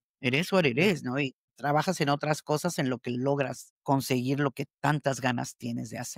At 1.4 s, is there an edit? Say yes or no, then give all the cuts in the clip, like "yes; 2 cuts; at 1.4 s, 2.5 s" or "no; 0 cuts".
yes; 2 cuts; at 1.4 s, 3.7 s